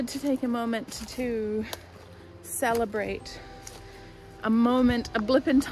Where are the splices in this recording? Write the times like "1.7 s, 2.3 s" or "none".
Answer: 1.0 s